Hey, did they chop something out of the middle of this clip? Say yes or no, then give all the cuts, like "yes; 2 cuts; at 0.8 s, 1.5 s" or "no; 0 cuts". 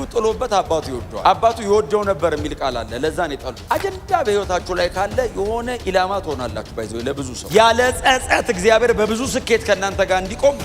yes; 3 cuts; at 1.0 s, 3.5 s, 7.3 s